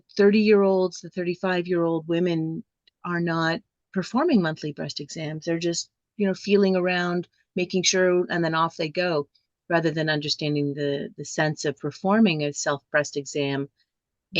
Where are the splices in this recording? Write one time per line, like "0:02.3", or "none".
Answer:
0:03.8